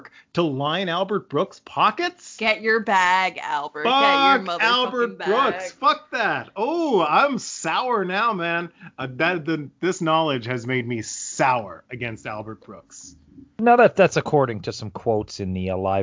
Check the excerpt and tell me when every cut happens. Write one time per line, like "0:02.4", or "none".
none